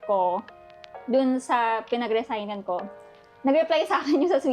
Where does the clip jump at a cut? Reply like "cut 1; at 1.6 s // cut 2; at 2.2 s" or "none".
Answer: none